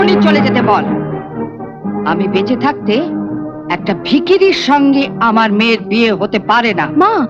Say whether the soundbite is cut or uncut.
uncut